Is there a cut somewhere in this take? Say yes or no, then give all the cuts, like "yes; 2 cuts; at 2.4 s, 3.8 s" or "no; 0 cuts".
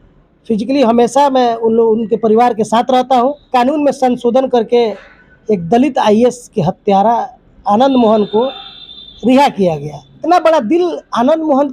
yes; 2 cuts; at 3.4 s, 10.2 s